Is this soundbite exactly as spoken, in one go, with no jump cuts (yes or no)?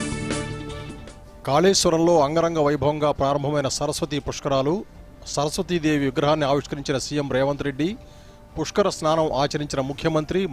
no